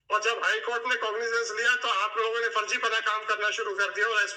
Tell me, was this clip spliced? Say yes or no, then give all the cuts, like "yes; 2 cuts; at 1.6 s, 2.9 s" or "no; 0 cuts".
no; 0 cuts